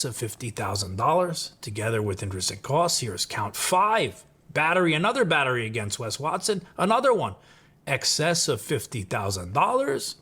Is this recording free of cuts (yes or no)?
yes